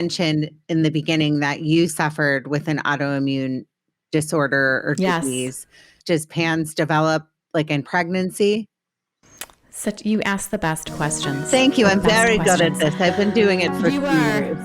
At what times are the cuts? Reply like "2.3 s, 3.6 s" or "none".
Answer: 6.0 s